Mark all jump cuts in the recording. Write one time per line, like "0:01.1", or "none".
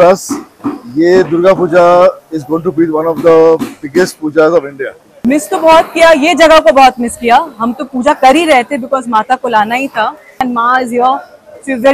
0:05.0
0:10.4